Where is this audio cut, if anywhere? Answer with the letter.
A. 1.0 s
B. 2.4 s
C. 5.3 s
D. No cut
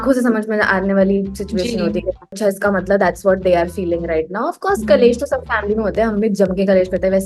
B